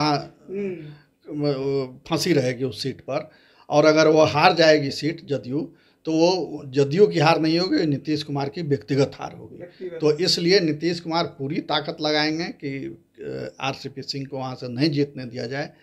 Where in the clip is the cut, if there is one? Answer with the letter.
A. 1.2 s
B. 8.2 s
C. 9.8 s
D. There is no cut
D